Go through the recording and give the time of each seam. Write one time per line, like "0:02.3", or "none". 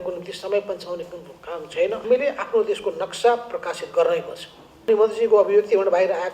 0:02.0
0:04.8